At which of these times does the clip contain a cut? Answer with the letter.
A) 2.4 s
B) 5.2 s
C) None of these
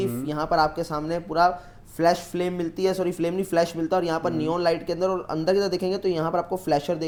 C